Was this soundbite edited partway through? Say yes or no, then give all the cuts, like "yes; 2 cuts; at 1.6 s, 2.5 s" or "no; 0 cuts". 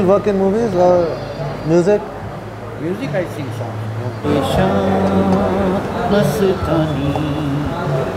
yes; 1 cut; at 4.3 s